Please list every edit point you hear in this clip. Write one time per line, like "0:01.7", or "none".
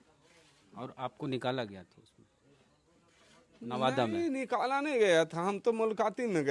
none